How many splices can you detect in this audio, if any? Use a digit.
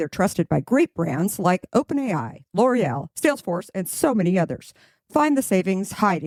0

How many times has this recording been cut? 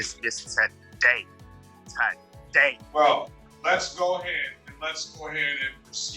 1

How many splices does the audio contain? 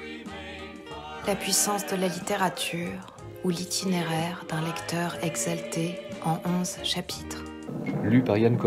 1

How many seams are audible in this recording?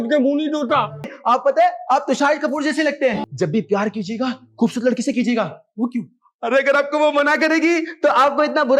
2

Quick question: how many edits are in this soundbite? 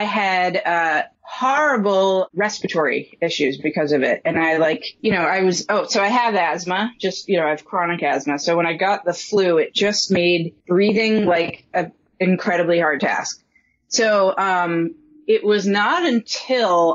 3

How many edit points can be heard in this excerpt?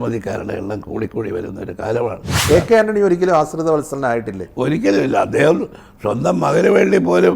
1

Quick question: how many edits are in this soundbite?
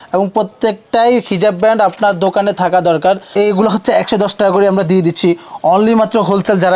1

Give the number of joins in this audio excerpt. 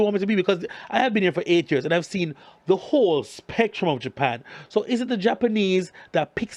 0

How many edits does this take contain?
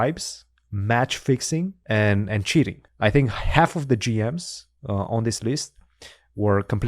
2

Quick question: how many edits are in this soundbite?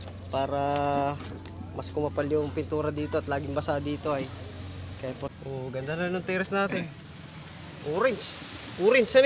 1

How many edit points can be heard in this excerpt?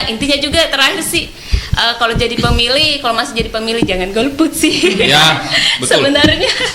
0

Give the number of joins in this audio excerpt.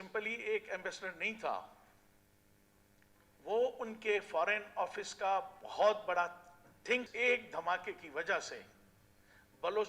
1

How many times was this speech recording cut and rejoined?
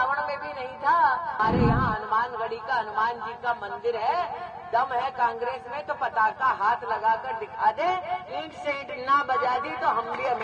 1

